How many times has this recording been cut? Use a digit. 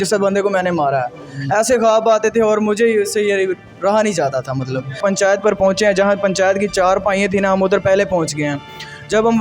1